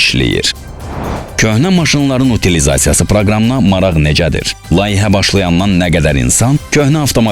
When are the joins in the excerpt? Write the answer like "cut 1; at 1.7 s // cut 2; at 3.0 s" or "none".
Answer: cut 1; at 1.0 s